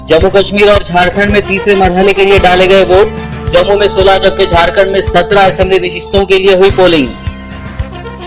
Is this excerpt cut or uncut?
uncut